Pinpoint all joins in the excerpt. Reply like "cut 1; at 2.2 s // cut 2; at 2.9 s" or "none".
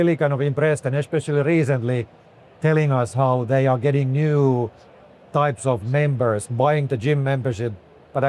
none

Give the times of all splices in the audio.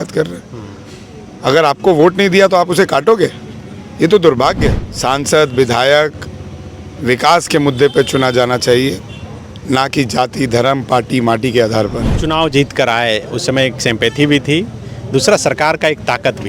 cut 1; at 4.9 s // cut 2; at 12.1 s

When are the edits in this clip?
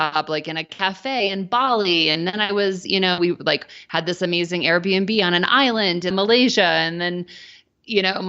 cut 1; at 1.2 s // cut 2; at 6.1 s

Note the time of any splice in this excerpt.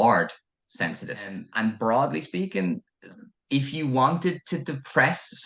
cut 1; at 1.4 s

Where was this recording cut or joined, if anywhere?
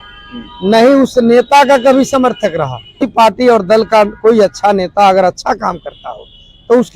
cut 1; at 3.1 s

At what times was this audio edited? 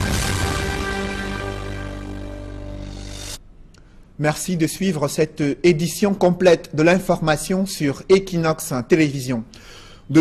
cut 1; at 5.9 s

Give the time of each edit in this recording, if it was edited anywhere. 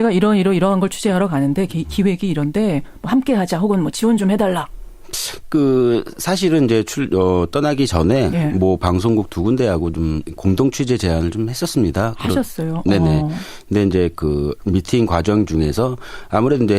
cut 1; at 11.5 s

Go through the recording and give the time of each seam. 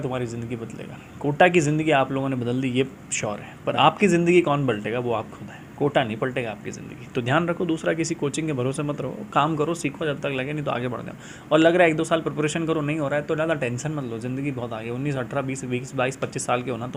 none

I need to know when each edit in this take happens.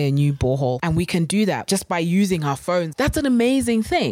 cut 1; at 0.8 s // cut 2; at 1.6 s // cut 3; at 2.9 s

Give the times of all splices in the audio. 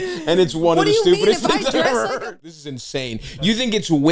cut 1; at 2.2 s

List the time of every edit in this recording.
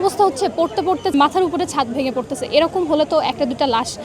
cut 1; at 1.1 s

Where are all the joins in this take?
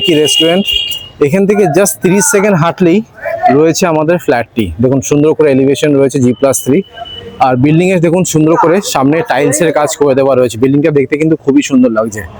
none

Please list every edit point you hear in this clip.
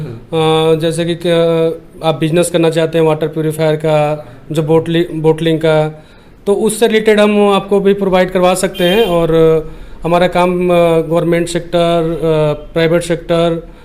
none

